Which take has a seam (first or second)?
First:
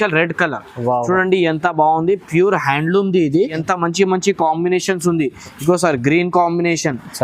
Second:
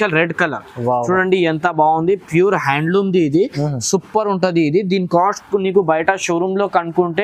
first